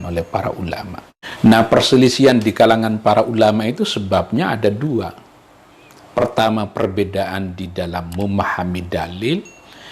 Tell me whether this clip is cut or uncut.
cut